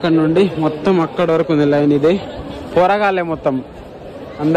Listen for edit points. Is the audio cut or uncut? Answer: uncut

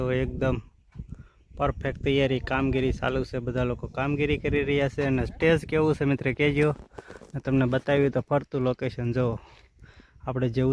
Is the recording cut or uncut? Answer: uncut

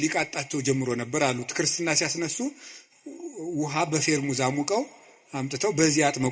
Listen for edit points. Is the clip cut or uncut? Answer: uncut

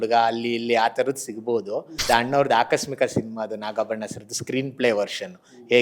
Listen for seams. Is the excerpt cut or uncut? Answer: cut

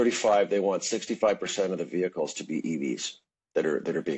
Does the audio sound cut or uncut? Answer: uncut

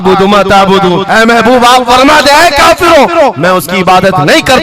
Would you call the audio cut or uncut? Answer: uncut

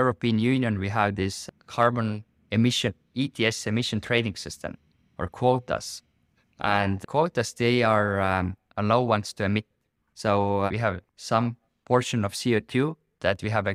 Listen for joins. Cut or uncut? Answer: uncut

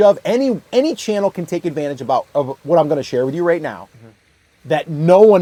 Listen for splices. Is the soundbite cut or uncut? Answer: uncut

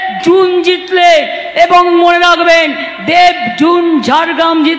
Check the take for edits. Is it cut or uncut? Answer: uncut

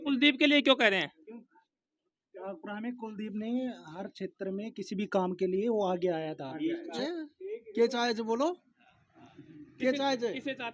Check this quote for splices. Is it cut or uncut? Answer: cut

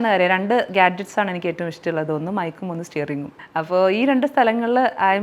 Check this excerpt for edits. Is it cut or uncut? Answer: cut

